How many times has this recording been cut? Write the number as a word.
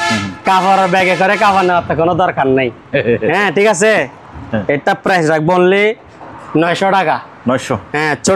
zero